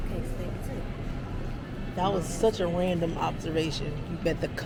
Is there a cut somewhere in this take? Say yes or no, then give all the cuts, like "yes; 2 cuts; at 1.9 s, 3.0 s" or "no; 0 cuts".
no; 0 cuts